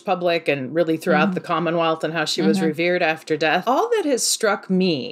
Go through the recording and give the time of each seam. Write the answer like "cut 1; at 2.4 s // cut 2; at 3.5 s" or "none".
cut 1; at 3.6 s